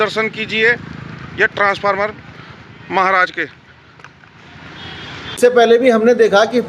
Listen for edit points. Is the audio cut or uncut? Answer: cut